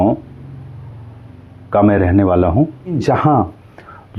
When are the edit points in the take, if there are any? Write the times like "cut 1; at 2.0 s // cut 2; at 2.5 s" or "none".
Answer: cut 1; at 3.0 s